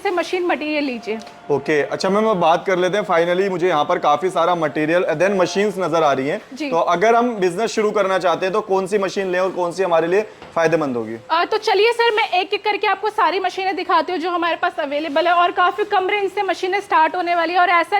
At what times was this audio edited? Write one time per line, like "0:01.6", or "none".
none